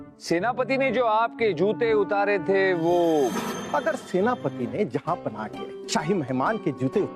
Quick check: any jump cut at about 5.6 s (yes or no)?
no